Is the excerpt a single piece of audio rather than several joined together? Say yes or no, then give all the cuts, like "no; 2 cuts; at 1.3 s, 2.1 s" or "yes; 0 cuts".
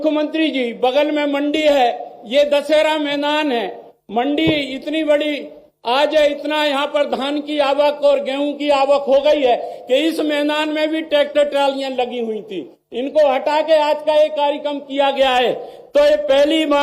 yes; 0 cuts